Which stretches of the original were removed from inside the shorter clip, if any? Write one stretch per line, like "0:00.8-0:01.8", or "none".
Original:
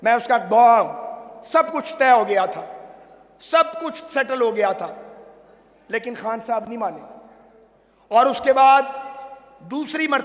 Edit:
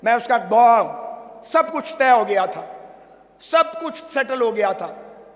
none